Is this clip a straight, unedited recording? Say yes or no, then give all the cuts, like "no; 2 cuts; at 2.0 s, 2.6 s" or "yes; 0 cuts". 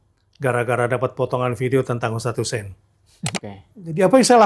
no; 1 cut; at 3.4 s